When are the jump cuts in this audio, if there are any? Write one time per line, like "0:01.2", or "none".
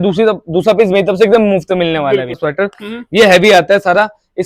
0:02.4